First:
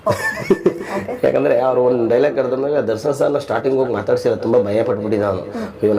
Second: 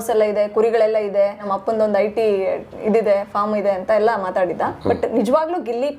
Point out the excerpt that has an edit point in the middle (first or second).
second